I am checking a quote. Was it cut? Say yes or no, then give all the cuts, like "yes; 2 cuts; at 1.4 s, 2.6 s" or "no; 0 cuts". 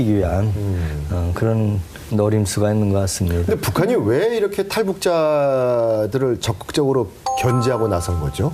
yes; 1 cut; at 4.5 s